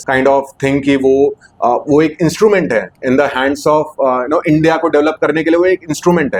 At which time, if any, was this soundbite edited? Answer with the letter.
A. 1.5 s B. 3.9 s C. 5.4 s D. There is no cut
D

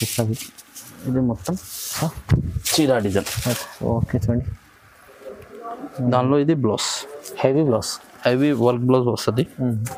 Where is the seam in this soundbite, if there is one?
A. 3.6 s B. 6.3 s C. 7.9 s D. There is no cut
D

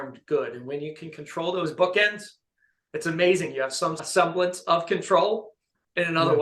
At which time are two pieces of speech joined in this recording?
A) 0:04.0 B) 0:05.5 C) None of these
A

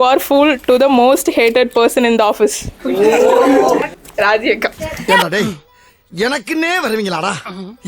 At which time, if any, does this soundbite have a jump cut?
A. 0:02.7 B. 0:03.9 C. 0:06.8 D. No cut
B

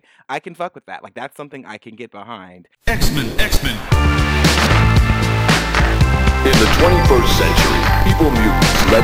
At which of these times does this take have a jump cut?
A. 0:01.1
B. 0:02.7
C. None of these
B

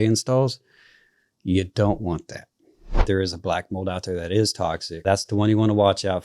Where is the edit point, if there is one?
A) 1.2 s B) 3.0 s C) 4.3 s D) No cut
B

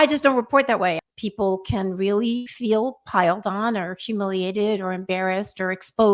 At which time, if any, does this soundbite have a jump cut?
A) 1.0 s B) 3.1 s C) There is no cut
A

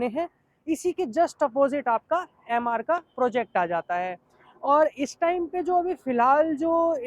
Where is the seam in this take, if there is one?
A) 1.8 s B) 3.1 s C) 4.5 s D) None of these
D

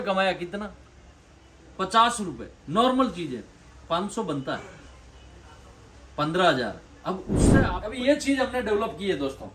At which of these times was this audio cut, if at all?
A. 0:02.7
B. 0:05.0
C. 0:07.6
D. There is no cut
C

